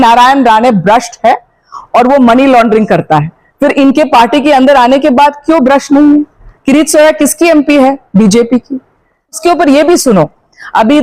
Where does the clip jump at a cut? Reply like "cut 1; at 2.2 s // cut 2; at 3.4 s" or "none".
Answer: cut 1; at 9.4 s